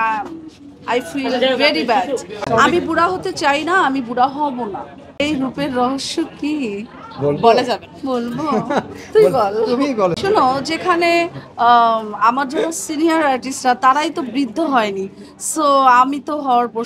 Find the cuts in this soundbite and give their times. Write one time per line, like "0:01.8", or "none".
0:02.3
0:05.2
0:10.2